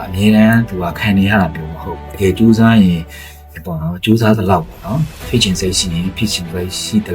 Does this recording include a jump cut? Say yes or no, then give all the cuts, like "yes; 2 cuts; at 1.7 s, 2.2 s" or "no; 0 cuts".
yes; 1 cut; at 2.1 s